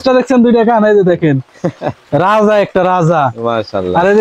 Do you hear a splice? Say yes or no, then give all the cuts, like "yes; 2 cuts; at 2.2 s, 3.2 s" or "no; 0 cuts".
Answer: no; 0 cuts